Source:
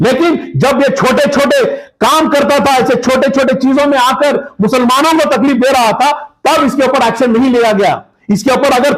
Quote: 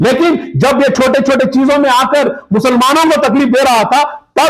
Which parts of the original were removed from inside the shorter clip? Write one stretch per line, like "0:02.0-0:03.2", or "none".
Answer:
0:00.9-0:03.0